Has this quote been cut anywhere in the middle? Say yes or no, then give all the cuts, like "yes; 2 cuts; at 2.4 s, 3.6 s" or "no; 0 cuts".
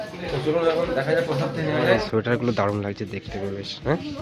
yes; 1 cut; at 2.1 s